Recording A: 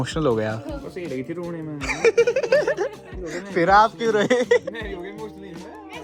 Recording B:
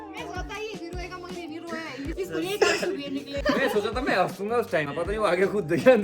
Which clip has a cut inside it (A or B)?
B